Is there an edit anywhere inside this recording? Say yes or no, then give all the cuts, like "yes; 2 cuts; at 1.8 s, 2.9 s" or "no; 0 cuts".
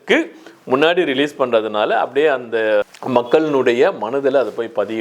no; 0 cuts